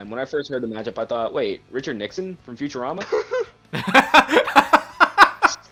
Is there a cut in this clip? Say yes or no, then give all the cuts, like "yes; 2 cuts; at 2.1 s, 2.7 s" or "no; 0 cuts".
no; 0 cuts